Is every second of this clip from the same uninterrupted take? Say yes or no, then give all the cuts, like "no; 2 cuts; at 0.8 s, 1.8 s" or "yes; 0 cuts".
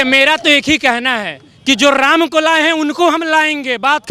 yes; 0 cuts